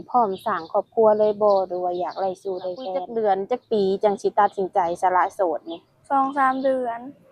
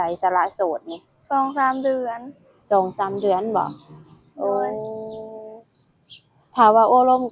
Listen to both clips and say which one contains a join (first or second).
first